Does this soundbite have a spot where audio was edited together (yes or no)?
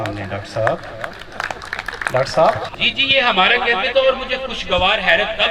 yes